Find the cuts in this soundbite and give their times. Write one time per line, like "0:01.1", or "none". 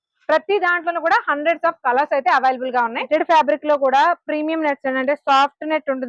0:03.1